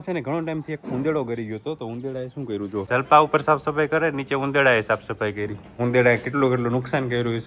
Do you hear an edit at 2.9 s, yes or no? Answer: yes